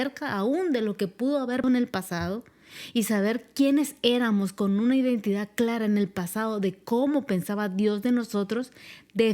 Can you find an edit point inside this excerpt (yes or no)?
yes